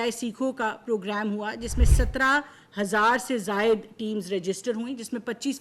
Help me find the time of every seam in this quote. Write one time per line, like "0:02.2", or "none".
none